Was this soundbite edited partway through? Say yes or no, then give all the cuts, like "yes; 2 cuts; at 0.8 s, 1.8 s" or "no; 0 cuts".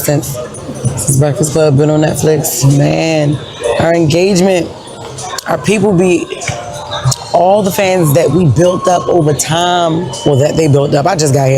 no; 0 cuts